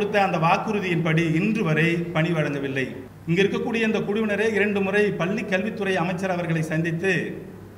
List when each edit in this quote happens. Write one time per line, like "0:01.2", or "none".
0:03.1